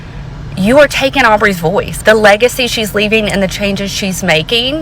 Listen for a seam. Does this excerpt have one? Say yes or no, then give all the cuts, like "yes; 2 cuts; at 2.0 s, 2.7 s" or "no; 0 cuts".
yes; 1 cut; at 1.9 s